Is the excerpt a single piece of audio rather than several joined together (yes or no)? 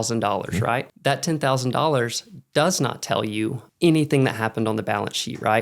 no